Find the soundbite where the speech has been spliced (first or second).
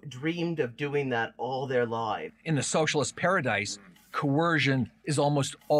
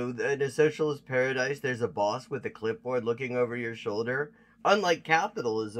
first